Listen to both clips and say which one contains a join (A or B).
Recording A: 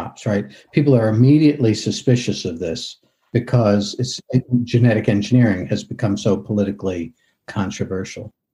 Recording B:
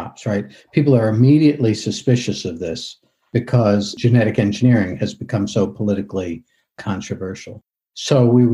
B